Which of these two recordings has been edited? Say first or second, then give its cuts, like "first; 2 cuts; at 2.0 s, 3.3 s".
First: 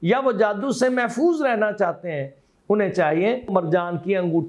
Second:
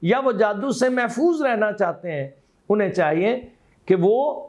first; 1 cut; at 3.5 s